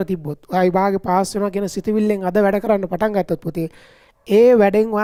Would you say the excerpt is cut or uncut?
uncut